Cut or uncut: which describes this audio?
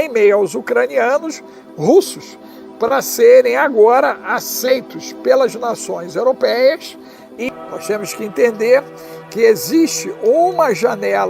cut